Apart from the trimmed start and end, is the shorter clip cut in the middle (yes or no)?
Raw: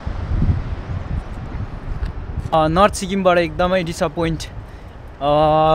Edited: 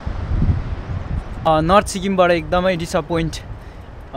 yes